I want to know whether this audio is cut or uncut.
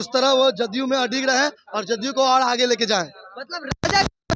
uncut